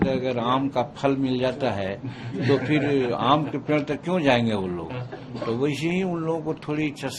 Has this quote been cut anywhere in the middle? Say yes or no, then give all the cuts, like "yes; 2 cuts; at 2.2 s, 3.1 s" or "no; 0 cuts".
no; 0 cuts